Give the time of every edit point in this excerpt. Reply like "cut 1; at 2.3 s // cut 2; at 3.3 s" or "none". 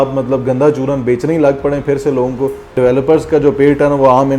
cut 1; at 2.7 s